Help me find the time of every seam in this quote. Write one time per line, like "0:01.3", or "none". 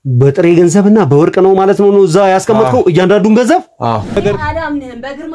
0:04.1